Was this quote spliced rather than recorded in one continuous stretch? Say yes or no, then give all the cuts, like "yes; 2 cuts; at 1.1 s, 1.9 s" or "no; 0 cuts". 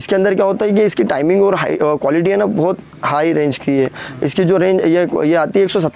no; 0 cuts